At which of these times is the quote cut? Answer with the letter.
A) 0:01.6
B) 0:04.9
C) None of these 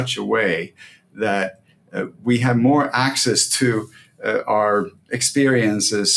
C